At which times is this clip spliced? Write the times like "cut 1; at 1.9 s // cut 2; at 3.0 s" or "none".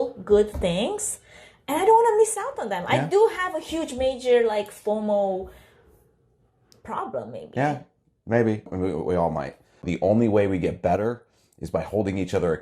cut 1; at 9.9 s

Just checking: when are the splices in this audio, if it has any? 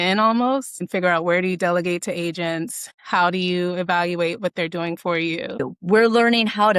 cut 1; at 5.5 s

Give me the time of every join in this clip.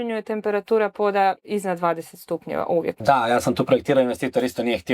cut 1; at 3.0 s

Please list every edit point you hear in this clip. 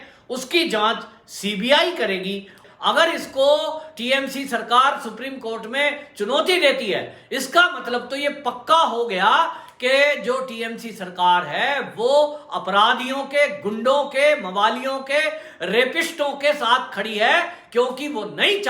cut 1; at 2.6 s

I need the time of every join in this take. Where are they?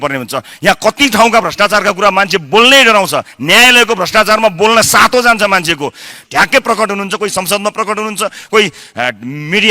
cut 1; at 6.1 s

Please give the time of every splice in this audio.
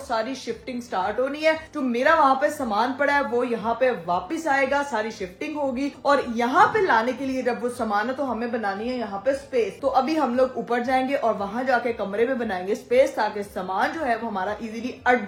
none

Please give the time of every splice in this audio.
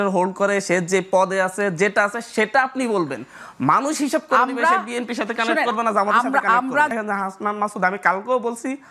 cut 1; at 6.9 s

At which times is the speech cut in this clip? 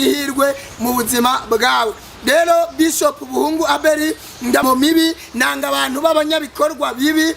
cut 1; at 4.6 s

